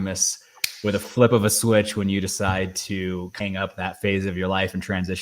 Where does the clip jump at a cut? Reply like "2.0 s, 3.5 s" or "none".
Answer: 3.3 s